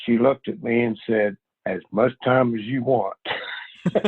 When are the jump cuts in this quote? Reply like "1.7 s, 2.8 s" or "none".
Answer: 1.5 s